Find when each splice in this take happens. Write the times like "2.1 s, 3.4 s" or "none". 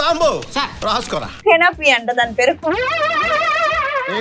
1.3 s